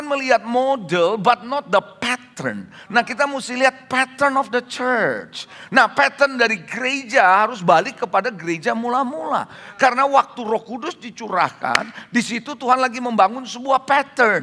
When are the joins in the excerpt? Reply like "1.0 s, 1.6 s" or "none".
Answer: none

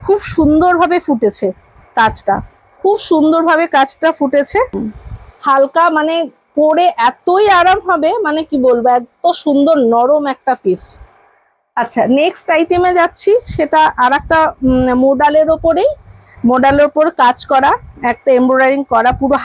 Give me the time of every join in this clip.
4.8 s

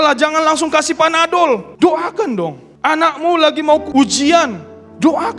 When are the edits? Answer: 1.7 s, 2.7 s, 3.9 s

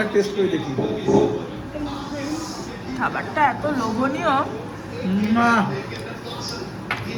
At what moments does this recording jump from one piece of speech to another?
none

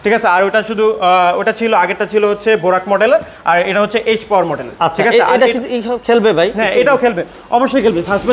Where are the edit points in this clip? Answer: none

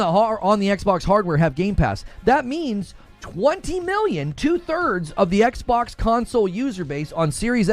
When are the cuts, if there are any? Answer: 2.1 s

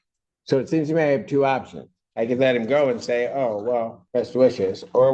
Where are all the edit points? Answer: 4.0 s

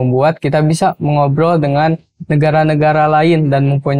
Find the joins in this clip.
none

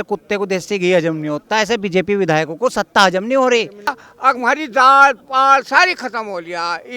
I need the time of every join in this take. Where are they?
4.0 s

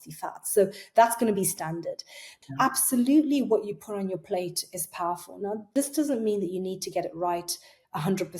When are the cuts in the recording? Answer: 2.3 s, 5.7 s

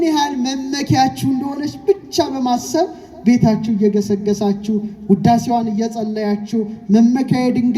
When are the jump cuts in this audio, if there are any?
none

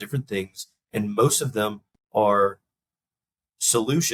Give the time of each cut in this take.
none

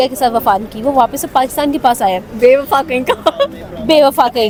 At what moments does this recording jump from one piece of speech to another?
none

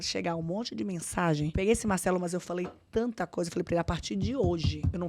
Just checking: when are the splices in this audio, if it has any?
1.5 s

